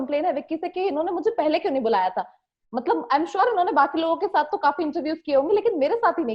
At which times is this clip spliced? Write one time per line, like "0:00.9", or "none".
none